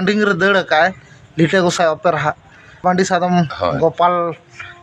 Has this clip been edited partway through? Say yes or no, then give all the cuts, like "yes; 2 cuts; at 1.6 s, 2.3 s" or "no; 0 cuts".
yes; 1 cut; at 2.8 s